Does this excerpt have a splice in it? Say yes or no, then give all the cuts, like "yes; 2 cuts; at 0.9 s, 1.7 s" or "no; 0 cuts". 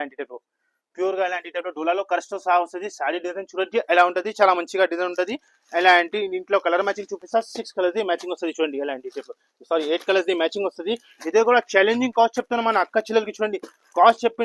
no; 0 cuts